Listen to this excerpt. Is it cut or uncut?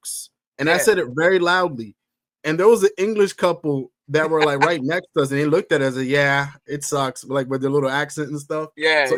uncut